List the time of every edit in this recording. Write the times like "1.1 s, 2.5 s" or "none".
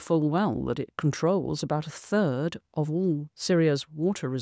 0.9 s, 3.3 s

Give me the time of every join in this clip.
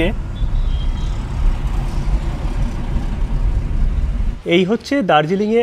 4.4 s

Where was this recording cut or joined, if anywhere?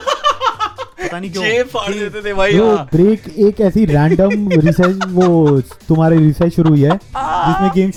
none

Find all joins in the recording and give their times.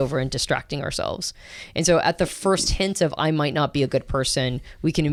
none

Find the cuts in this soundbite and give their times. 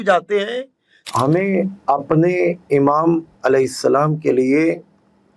1.0 s

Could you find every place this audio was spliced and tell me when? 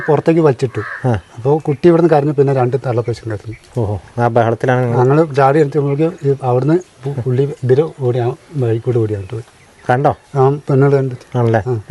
none

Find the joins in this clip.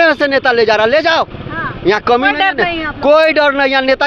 none

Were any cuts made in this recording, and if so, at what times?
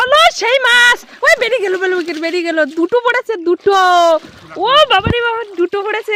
none

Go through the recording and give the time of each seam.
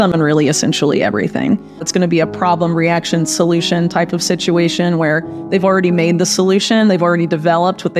1.9 s

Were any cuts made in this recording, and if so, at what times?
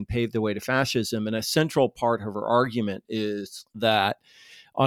none

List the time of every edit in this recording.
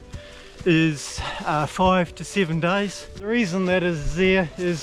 3.3 s

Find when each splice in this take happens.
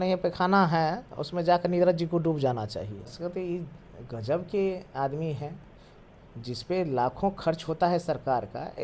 3.1 s

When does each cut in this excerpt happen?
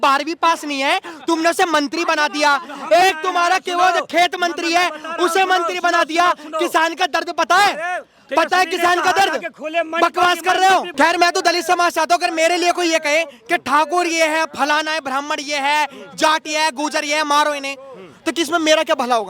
10.9 s

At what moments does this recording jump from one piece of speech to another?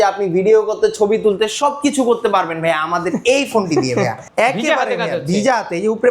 4.2 s

